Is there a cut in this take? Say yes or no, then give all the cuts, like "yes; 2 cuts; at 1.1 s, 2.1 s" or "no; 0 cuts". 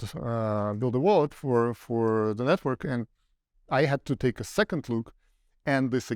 no; 0 cuts